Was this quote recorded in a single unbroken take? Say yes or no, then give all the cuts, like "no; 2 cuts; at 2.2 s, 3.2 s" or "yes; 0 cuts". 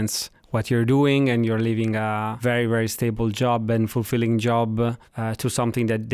no; 2 cuts; at 2.3 s, 5.1 s